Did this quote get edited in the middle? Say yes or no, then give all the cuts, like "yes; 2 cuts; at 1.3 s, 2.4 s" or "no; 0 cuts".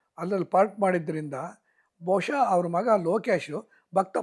no; 0 cuts